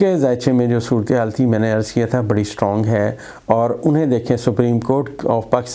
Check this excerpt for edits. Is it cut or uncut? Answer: uncut